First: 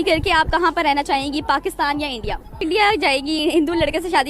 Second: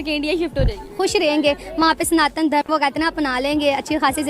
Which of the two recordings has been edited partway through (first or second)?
first